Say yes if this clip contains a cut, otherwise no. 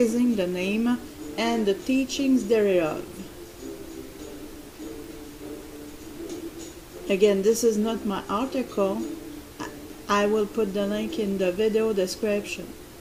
no